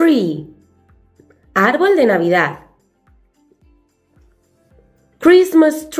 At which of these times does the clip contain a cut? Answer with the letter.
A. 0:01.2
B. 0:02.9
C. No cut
C